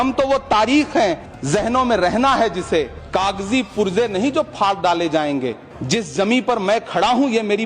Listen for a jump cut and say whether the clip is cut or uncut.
cut